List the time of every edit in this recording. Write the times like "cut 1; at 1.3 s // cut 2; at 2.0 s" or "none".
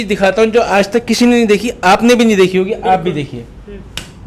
none